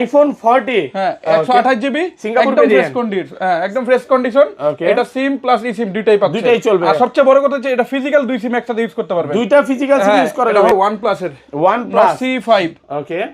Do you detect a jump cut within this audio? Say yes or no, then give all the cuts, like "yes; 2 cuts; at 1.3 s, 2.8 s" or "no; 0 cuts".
yes; 1 cut; at 10.7 s